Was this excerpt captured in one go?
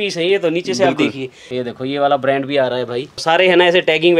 no; 2 cuts; at 1.5 s, 3.2 s

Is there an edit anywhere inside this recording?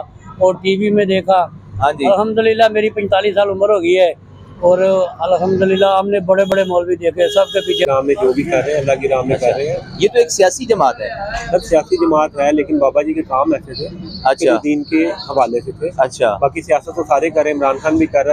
yes; 1 cut; at 7.8 s

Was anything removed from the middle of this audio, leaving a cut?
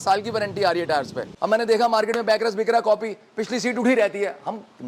yes; 1 cut; at 1.2 s

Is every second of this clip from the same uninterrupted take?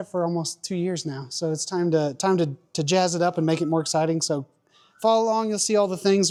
yes; 0 cuts

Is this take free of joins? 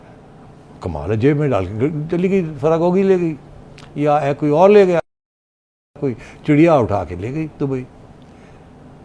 yes; 0 cuts

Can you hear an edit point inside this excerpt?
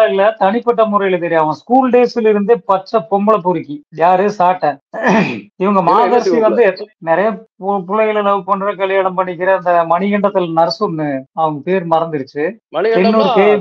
no; 0 cuts

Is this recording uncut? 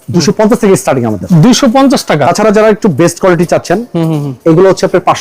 no; 1 cut; at 2.2 s

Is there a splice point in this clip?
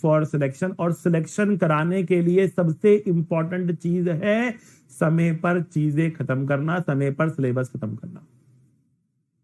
no; 0 cuts

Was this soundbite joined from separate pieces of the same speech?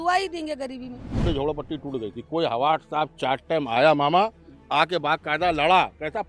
yes; 1 cut; at 1.2 s

